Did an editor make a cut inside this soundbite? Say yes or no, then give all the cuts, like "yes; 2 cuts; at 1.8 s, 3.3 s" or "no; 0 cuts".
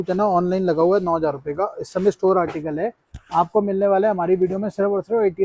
no; 0 cuts